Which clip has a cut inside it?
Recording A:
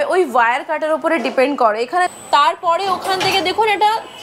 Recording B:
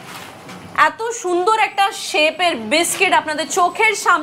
A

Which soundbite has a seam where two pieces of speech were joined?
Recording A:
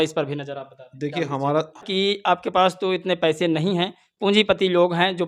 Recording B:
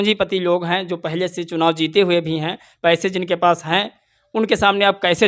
A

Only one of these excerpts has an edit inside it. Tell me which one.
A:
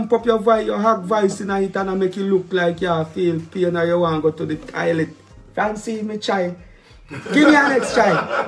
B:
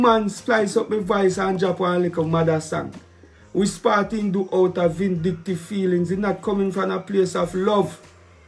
A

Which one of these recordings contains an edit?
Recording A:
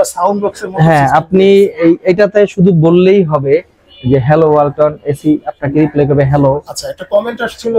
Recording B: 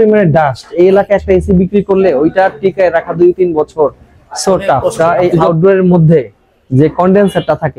B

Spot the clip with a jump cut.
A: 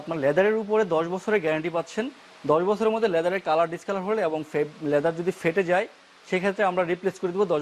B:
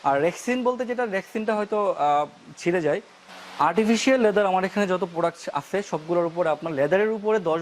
B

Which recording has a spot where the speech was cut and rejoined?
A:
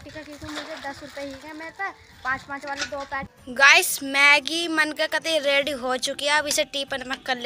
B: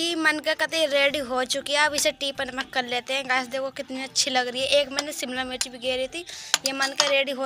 A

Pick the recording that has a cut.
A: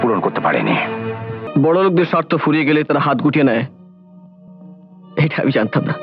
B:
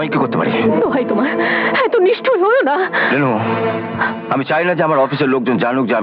A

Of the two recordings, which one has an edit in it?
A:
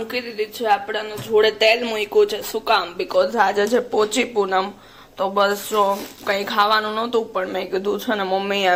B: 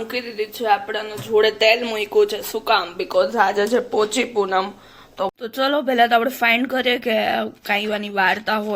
B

